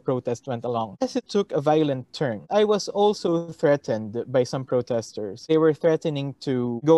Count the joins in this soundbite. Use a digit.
2